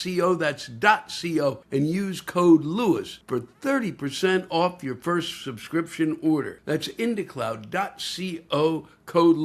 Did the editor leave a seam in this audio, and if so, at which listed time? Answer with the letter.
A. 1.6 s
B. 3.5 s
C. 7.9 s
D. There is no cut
A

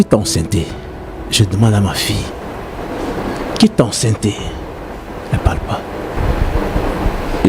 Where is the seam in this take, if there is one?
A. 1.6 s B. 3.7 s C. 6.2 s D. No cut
C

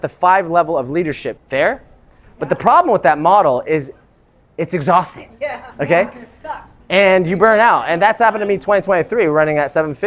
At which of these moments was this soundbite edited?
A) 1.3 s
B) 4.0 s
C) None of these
A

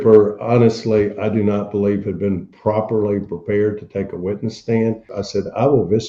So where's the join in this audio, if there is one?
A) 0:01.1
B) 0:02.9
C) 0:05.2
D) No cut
C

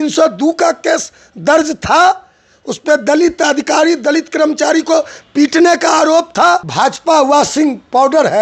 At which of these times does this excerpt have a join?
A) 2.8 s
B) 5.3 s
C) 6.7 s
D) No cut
C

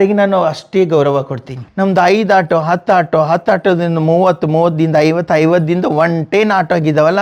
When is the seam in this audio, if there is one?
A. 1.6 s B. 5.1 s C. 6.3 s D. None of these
A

